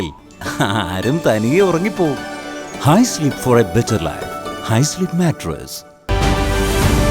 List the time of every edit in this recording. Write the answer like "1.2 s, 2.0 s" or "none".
6.1 s